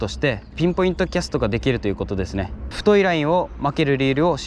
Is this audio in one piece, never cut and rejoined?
no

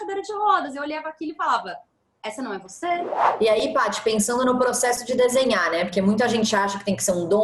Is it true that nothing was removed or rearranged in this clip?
no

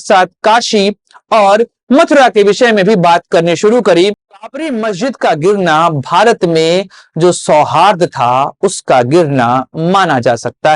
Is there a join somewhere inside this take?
yes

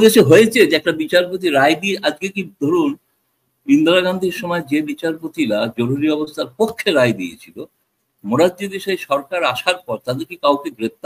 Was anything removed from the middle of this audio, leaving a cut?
no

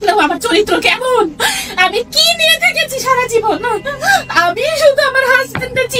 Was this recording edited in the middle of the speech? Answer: no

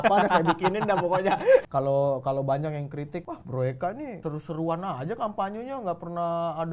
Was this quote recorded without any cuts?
no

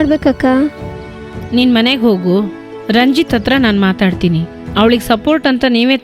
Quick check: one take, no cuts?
no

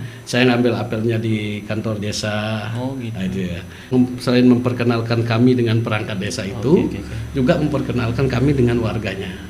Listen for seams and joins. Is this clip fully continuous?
no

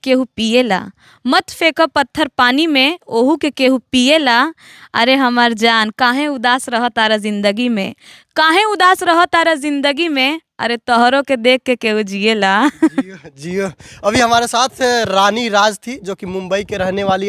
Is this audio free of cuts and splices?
yes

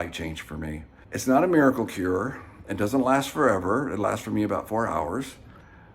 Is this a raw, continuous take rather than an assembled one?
no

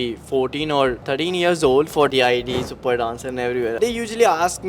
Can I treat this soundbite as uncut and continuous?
no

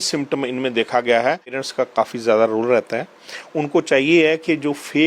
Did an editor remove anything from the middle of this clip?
yes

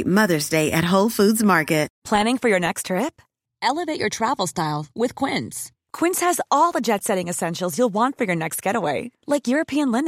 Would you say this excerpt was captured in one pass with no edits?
no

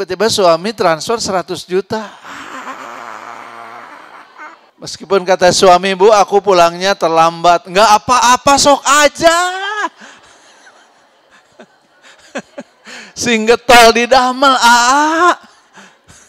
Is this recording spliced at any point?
yes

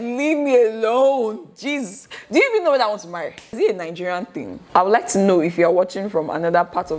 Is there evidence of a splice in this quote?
no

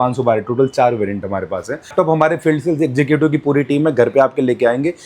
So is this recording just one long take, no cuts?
no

